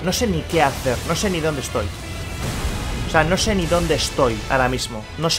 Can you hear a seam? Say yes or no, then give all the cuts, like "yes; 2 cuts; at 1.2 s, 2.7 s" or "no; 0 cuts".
no; 0 cuts